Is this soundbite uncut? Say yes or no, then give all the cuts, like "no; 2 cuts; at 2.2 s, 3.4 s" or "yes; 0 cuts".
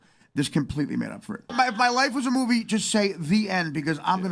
no; 1 cut; at 1.5 s